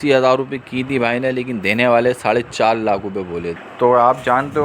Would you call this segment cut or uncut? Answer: cut